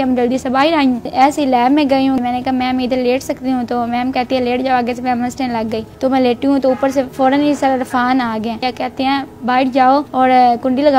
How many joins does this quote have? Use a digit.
6